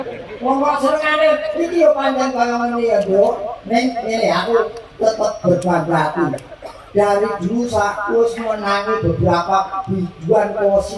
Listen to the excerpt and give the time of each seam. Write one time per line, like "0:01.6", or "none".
none